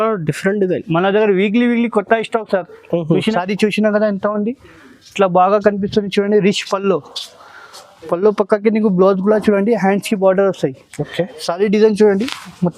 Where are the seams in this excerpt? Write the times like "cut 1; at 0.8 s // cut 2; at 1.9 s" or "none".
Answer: cut 1; at 3.3 s